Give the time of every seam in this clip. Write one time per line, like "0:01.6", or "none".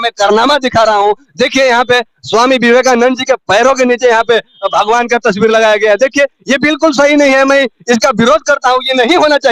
none